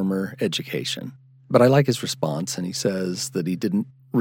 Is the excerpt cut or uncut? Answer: uncut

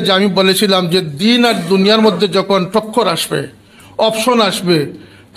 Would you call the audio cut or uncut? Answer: uncut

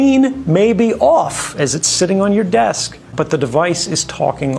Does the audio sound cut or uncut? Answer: cut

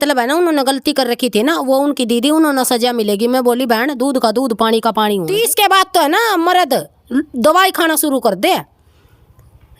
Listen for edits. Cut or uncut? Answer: cut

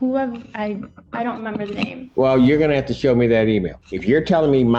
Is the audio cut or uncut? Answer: cut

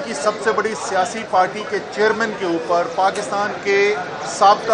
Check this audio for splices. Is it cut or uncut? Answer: uncut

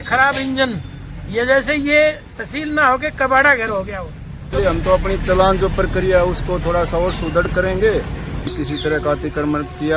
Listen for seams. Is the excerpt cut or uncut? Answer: cut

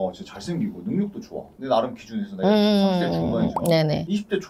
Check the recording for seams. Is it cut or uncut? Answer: uncut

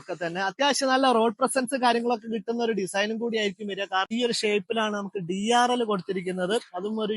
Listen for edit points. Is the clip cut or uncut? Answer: cut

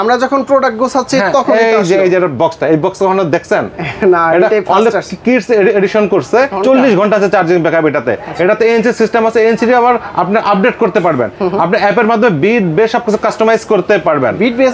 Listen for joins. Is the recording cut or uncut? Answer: cut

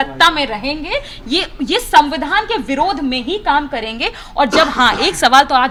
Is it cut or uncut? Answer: uncut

